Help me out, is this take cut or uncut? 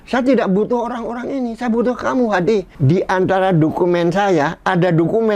cut